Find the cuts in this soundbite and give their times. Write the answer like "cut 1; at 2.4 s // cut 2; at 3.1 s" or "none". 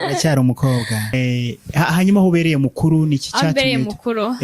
cut 1; at 1.1 s